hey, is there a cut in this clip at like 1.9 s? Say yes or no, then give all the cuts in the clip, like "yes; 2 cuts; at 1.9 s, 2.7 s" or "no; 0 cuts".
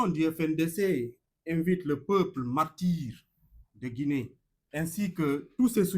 no; 1 cut; at 4.9 s